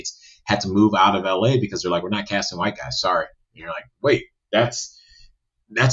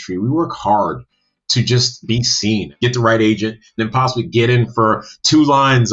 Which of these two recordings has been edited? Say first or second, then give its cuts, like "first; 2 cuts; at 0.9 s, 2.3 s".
second; 2 cuts; at 2.7 s, 3.8 s